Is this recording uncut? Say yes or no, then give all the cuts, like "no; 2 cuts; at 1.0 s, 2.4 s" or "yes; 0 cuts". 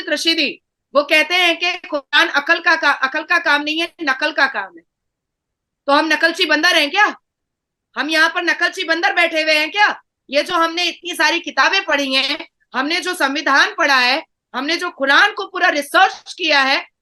yes; 0 cuts